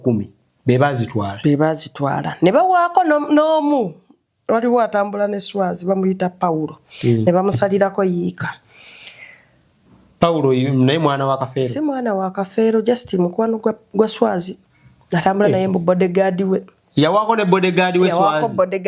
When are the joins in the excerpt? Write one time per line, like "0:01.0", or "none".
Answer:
none